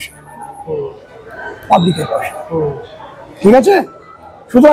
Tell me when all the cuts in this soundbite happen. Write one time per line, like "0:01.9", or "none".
none